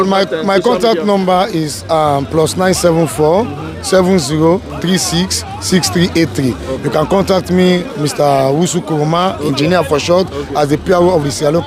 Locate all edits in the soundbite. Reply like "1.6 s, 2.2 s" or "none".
none